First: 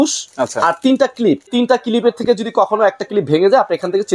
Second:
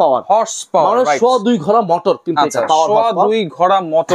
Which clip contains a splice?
first; 1 cut; at 1.5 s

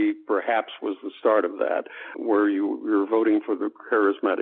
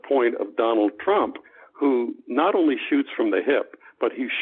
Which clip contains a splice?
first; 1 cut; at 2.1 s

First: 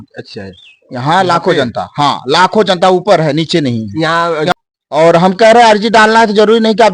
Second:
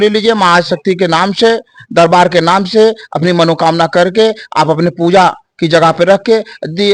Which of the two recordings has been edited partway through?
first; 1 cut; at 4.5 s

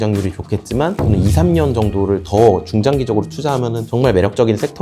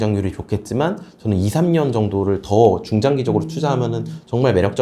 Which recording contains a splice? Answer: first; 2 cuts; at 1.0 s, 3.8 s

